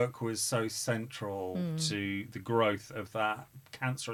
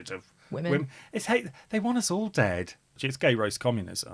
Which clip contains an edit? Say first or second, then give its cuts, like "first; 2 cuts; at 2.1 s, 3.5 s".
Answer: second; 1 cut; at 3.0 s